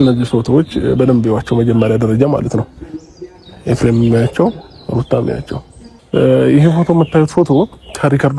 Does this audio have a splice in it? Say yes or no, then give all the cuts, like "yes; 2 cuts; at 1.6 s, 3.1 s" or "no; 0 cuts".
no; 0 cuts